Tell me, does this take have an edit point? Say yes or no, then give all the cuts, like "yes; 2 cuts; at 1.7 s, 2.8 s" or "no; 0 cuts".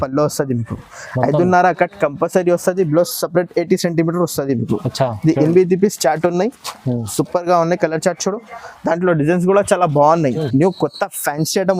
yes; 1 cut; at 10.4 s